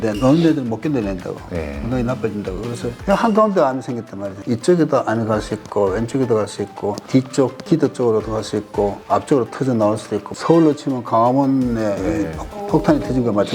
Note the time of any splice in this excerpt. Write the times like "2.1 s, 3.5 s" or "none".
2.9 s, 10.3 s